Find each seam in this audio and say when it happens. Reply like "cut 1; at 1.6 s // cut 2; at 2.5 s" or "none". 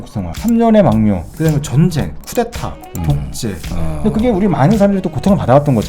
cut 1; at 3.8 s